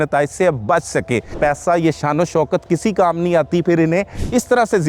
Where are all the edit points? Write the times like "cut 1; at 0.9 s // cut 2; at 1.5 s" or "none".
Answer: cut 1; at 1.4 s